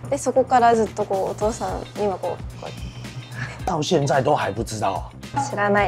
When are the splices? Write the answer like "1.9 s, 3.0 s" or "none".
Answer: 3.7 s